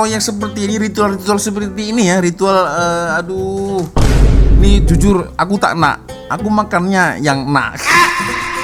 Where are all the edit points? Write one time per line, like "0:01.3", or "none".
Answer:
none